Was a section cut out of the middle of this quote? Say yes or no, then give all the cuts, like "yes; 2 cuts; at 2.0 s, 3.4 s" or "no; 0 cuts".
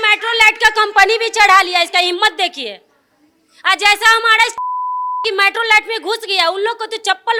no; 0 cuts